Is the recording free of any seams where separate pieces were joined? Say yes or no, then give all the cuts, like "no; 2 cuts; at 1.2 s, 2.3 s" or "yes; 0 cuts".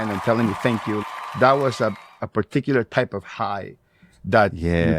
no; 1 cut; at 1.2 s